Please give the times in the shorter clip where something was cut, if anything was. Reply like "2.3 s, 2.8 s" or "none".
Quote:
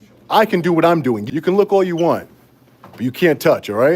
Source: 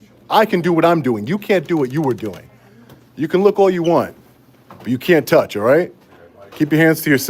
1.2 s